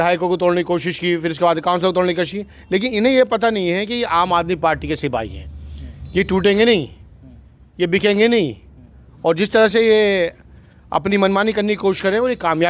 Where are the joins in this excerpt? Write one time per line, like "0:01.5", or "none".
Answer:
none